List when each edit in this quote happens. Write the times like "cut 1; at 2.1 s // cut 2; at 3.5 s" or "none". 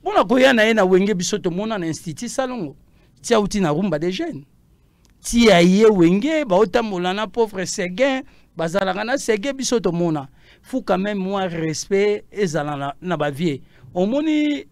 none